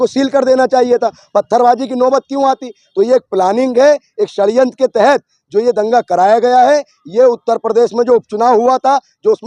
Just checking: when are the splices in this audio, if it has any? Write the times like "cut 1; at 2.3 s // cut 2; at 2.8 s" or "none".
none